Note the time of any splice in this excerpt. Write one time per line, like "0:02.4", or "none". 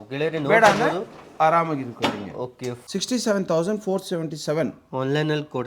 0:02.7